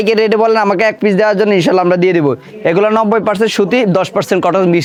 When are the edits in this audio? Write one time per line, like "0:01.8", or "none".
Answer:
none